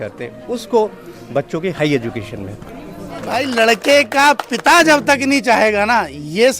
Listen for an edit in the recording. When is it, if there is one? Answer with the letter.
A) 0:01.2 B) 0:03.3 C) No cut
B